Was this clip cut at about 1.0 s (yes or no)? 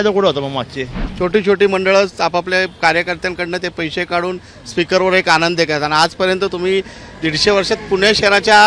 yes